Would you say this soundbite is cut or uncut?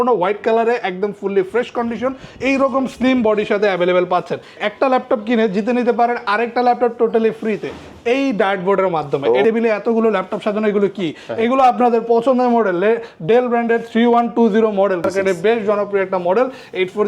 cut